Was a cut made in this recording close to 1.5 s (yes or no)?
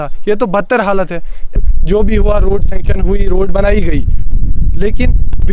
yes